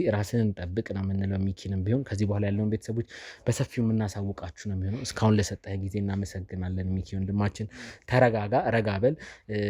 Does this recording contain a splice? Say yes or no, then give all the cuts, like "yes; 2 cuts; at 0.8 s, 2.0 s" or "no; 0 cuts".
no; 0 cuts